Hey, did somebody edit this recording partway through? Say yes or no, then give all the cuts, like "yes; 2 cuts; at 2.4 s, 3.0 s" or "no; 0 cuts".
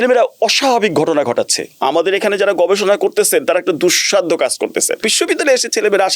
yes; 2 cuts; at 1.6 s, 5.1 s